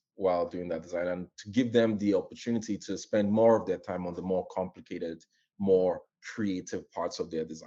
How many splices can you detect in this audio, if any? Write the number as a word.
zero